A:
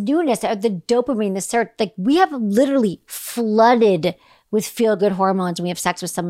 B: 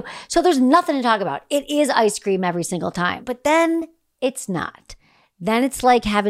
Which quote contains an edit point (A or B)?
B